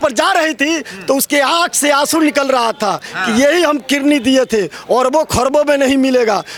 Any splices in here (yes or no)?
no